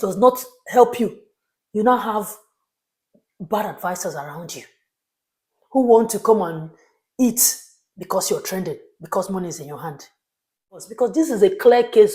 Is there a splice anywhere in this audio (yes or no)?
yes